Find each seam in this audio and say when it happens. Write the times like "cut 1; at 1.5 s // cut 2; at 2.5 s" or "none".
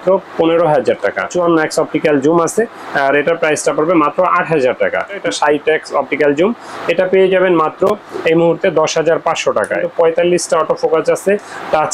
cut 1; at 1.3 s // cut 2; at 5.1 s // cut 3; at 9.9 s

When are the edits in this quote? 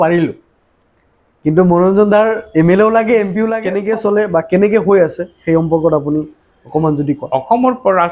cut 1; at 3.7 s

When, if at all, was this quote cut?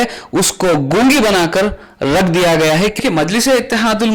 cut 1; at 3.0 s

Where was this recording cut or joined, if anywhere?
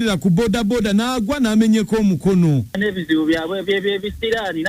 cut 1; at 2.7 s

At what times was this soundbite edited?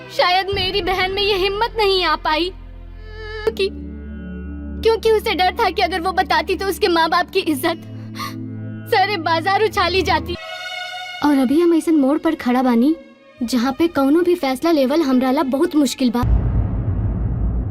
cut 1; at 3.5 s // cut 2; at 10.4 s // cut 3; at 16.2 s

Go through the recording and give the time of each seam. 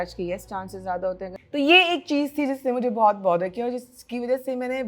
cut 1; at 1.3 s

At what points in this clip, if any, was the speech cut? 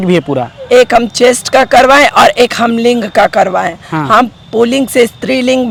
none

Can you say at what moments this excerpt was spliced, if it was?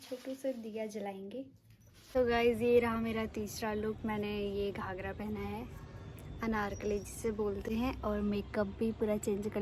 none

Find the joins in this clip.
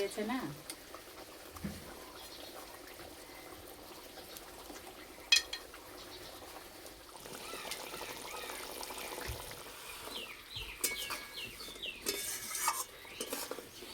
none

